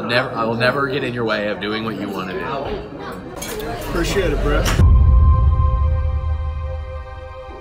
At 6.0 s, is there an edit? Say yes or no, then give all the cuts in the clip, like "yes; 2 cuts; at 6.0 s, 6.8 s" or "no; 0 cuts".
no; 1 cut; at 4.7 s